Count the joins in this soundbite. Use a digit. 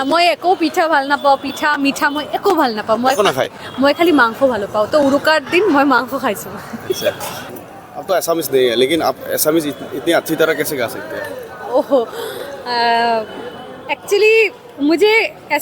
1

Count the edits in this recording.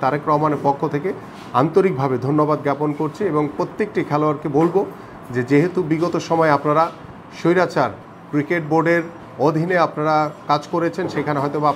0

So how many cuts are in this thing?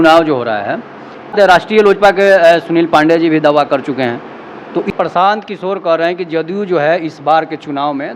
2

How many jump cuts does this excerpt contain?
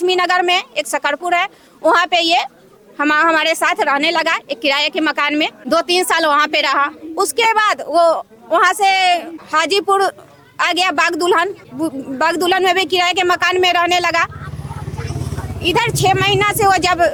0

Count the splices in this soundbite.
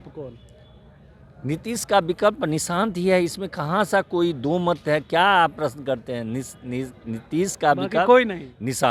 0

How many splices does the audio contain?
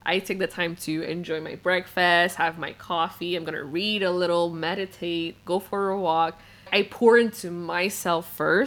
1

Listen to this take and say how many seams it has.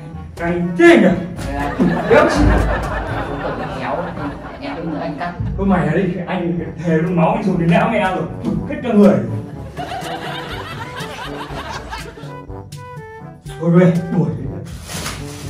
0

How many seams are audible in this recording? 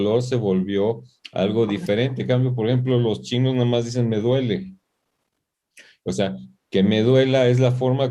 0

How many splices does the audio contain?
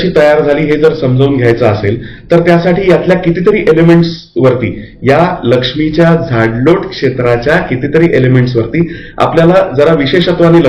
0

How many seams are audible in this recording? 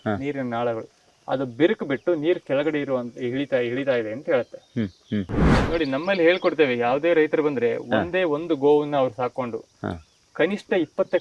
1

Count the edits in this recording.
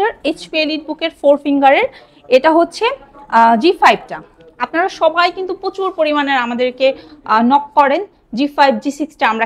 0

